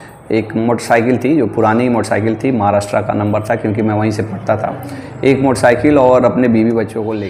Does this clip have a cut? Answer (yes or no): no